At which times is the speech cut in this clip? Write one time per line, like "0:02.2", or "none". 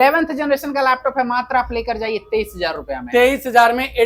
none